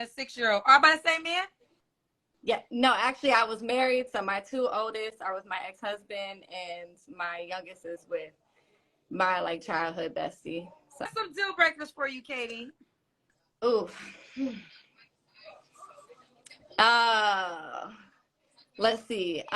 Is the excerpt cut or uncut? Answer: cut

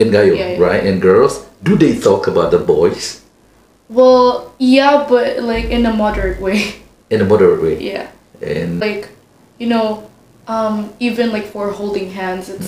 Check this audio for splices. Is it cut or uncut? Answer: cut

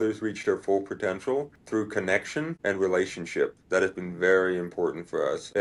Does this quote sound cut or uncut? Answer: cut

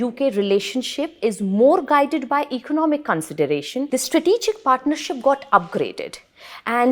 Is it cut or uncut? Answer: cut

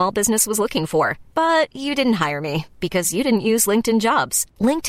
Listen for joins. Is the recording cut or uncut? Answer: uncut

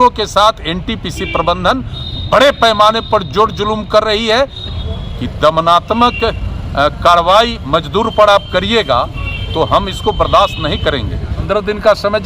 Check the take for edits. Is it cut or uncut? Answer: cut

